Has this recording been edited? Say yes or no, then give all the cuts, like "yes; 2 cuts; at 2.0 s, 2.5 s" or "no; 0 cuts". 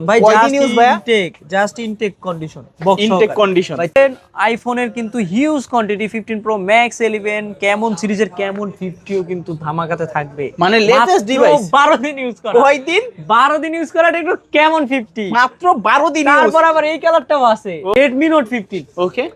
yes; 2 cuts; at 4.0 s, 17.9 s